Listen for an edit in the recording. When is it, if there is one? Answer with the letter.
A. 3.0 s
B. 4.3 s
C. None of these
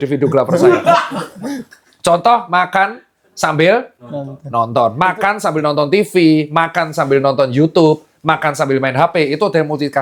C